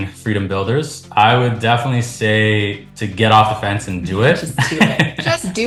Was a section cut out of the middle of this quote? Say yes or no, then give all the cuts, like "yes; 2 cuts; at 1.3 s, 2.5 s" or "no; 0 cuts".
no; 0 cuts